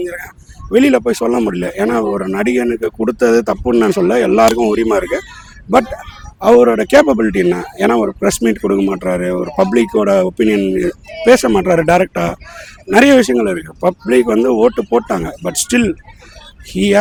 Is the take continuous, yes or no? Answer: yes